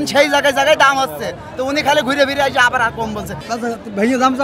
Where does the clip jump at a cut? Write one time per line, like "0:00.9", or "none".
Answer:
0:03.3